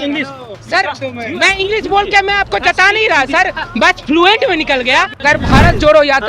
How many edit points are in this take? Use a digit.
1